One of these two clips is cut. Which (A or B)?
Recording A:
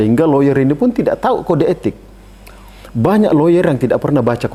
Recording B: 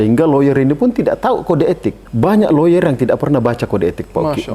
B